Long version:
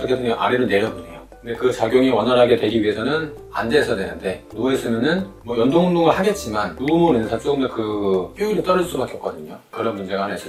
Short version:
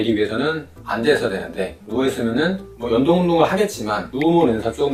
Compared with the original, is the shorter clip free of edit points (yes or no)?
yes